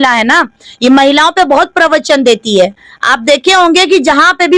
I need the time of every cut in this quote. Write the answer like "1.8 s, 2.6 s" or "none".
none